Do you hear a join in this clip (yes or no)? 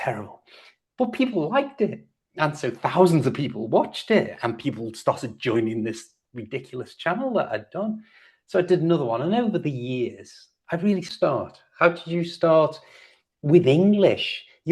yes